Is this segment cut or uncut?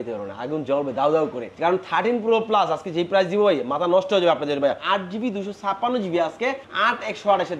cut